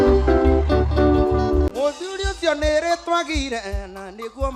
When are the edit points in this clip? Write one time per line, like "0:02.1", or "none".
0:01.7